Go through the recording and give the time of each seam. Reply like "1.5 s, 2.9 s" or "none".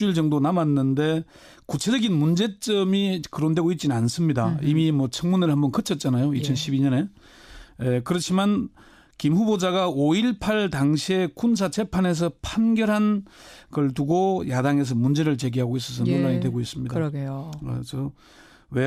none